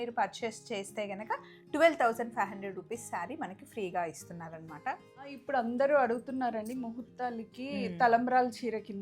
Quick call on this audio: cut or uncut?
cut